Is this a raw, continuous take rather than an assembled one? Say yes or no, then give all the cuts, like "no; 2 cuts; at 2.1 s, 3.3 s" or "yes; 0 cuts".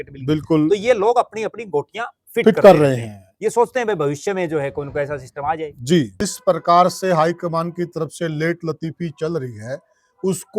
no; 1 cut; at 6.2 s